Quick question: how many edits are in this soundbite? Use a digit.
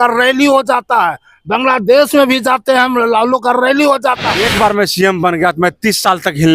1